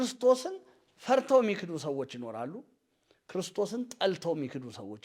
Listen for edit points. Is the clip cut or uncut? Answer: uncut